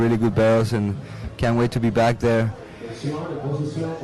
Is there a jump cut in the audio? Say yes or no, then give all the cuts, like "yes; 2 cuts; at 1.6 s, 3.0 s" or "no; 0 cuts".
yes; 1 cut; at 2.6 s